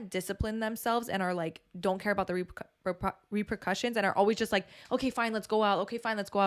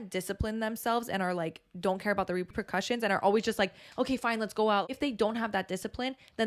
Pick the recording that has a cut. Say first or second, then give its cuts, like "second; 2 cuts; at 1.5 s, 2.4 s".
second; 2 cuts; at 2.5 s, 4.9 s